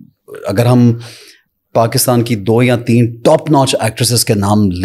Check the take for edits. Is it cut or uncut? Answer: uncut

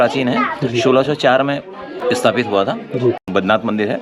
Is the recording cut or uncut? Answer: cut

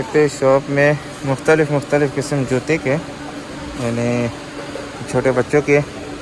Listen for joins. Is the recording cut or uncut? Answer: uncut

